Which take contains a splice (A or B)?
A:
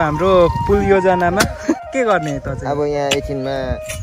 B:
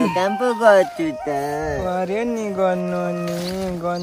A